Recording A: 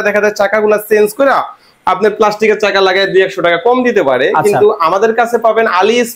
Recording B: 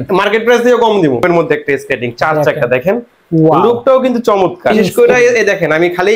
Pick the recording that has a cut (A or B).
B